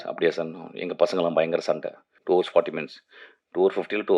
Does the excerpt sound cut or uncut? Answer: cut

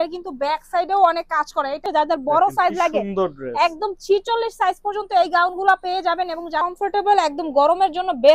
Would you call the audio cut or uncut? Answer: cut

